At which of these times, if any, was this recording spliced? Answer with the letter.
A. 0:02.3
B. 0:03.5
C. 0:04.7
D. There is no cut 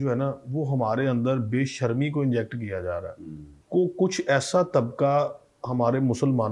B